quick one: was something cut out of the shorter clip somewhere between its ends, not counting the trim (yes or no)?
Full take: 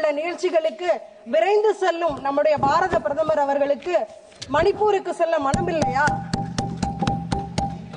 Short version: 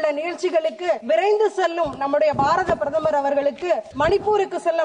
yes